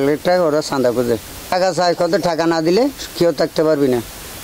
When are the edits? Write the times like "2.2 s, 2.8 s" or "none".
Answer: 1.4 s

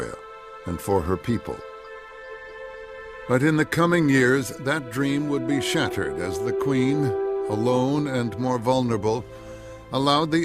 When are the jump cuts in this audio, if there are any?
9.3 s

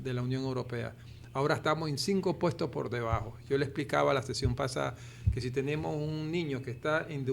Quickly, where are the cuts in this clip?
none

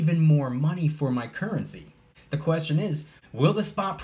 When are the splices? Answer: 2.2 s, 3.1 s

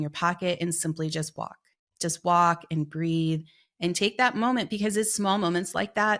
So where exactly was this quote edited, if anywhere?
none

